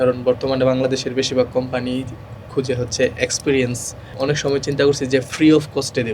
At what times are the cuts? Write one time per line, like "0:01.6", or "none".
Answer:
0:04.1